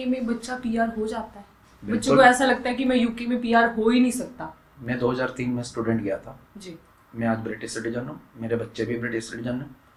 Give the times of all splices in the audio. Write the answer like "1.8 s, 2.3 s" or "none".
none